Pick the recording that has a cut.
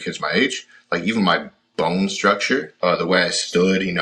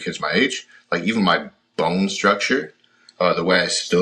first; 1 cut; at 2.7 s

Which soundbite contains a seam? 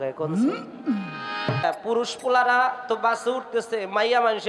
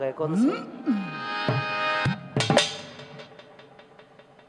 first; 1 cut; at 1.6 s

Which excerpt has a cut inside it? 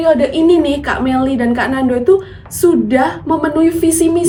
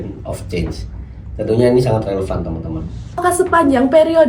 second; 1 cut; at 3.2 s

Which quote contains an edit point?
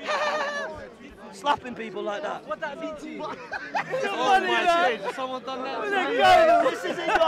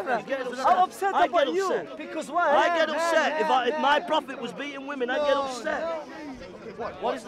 second; 1 cut; at 6.1 s

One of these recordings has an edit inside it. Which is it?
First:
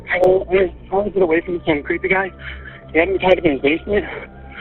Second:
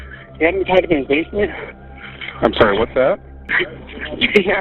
second; 1 cut; at 3.4 s

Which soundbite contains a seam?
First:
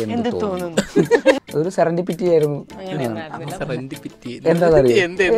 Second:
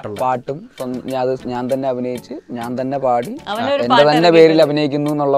first; 1 cut; at 1.4 s

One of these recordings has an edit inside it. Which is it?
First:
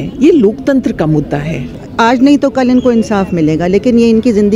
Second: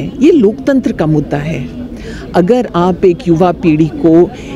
first; 1 cut; at 1.8 s

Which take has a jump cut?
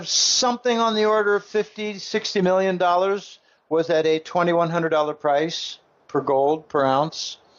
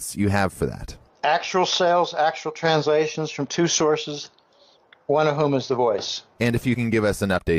second; 1 cut; at 2.9 s

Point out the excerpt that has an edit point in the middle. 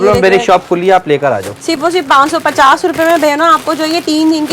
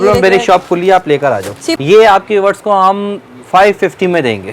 second; 1 cut; at 1.6 s

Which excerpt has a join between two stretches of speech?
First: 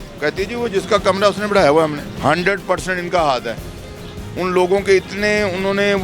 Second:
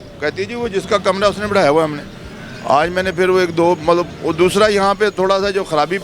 first; 1 cut; at 2.1 s

